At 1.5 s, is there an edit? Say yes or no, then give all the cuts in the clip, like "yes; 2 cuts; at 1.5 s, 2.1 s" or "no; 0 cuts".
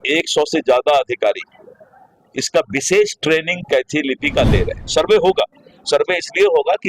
no; 1 cut; at 4.8 s